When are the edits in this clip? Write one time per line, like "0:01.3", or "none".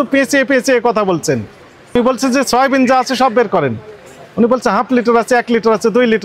0:02.0